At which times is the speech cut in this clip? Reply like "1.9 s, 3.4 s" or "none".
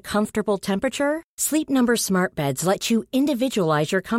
none